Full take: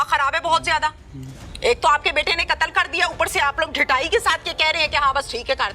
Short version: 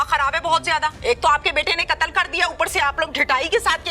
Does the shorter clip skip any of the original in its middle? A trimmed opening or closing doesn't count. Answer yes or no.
yes